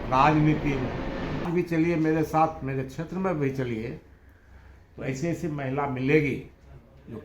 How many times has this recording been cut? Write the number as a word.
one